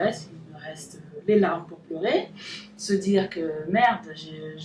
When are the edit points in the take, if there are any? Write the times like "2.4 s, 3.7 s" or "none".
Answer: none

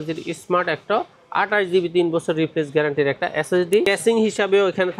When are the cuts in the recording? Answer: 3.9 s

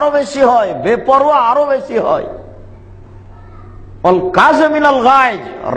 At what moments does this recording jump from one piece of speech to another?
1.0 s

